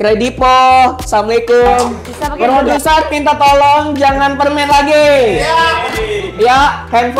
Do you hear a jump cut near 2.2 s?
yes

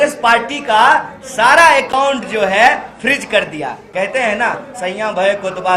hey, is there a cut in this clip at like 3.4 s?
no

